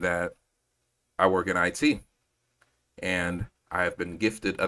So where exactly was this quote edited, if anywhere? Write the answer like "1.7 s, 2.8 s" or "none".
none